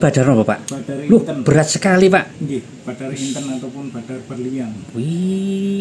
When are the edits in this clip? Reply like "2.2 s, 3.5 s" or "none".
4.8 s